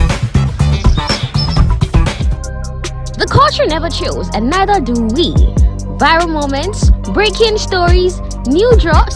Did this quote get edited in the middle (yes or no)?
yes